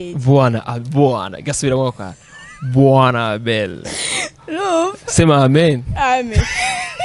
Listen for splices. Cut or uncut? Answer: uncut